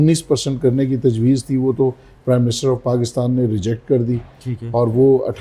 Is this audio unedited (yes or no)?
yes